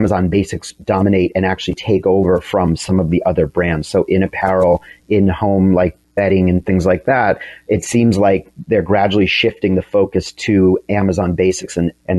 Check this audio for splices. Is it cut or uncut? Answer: uncut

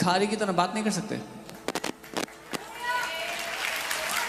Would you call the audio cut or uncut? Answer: uncut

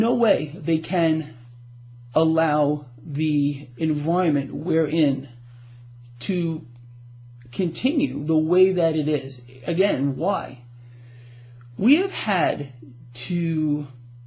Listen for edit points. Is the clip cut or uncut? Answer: cut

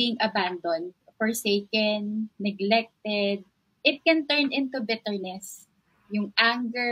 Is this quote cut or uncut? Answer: uncut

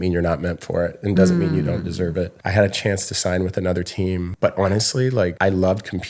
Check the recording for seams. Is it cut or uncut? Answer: cut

